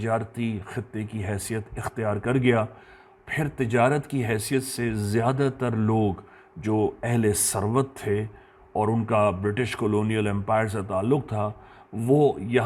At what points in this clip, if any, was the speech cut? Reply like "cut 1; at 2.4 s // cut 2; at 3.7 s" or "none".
none